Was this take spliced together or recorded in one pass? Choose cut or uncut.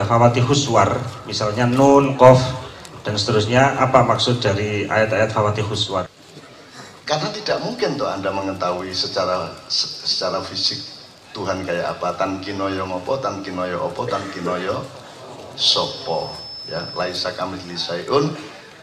cut